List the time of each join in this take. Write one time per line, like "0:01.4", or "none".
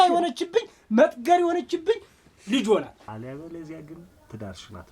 0:03.1